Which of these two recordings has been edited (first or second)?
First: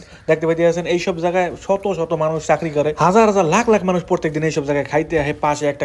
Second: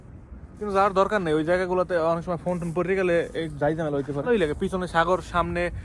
second